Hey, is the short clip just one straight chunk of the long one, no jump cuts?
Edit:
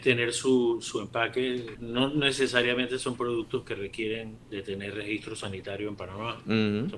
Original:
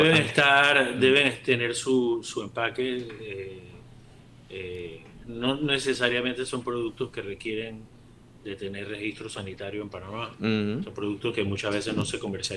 no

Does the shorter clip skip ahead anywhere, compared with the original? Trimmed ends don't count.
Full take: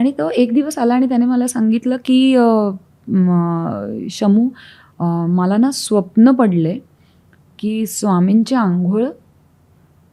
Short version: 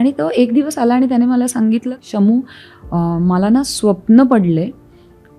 yes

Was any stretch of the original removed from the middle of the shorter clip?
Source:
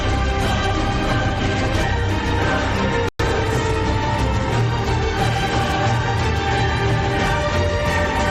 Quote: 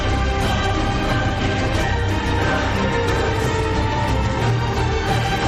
yes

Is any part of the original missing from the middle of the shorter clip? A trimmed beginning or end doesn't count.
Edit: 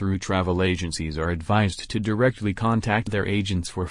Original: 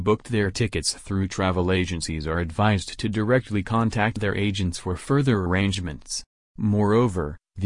no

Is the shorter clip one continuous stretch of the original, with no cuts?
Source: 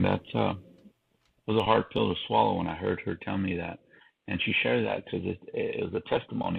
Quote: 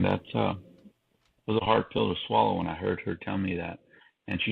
yes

